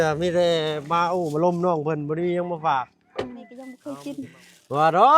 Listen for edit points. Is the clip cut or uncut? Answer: cut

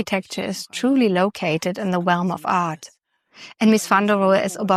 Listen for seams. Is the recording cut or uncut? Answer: uncut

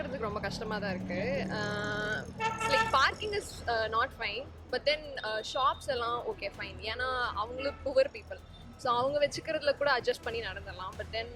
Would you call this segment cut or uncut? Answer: uncut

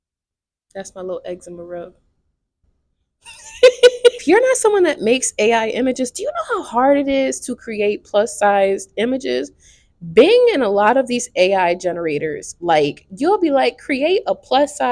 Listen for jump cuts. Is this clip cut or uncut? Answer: cut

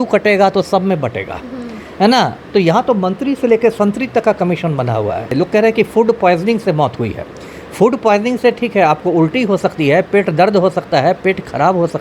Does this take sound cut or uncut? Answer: cut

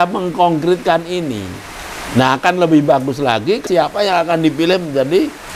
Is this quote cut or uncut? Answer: cut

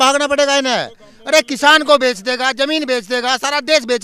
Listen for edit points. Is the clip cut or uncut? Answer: uncut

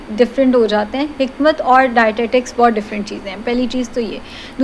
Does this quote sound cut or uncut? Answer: uncut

